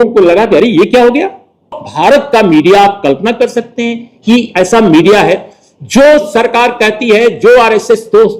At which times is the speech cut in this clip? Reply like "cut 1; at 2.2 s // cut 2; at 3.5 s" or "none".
cut 1; at 1.7 s